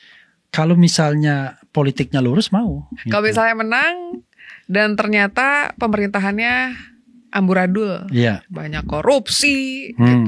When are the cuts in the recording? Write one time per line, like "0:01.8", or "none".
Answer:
0:02.9